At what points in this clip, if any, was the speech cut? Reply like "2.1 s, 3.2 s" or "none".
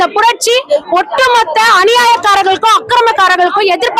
none